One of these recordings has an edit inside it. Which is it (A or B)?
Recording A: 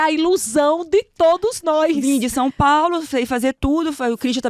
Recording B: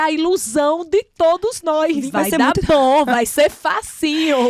B